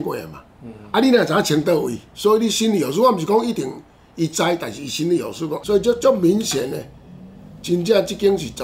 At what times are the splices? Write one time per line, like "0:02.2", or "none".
0:02.0
0:05.6